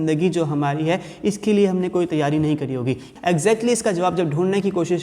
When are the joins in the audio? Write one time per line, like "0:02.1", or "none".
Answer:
0:03.0